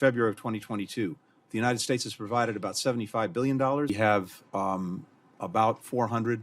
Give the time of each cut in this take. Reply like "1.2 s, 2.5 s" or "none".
3.9 s

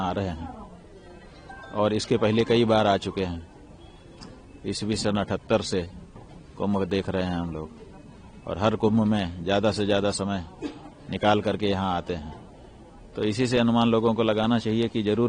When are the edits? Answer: none

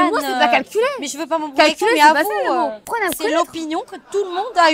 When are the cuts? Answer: 2.9 s

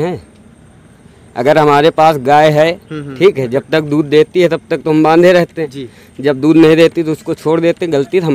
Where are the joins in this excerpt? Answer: none

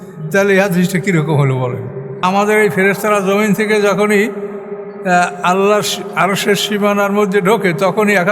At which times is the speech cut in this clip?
2.1 s

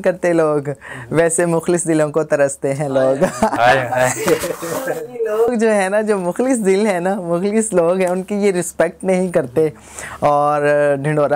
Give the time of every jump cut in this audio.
none

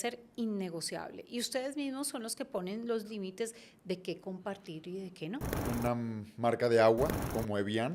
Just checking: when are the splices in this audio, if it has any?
5.6 s

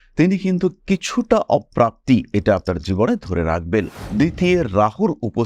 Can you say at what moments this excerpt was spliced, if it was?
4.0 s

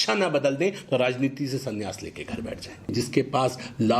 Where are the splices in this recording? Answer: 2.9 s

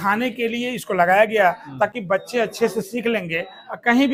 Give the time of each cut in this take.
none

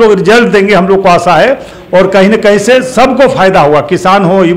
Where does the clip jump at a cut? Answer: none

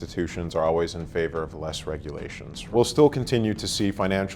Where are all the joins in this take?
2.6 s

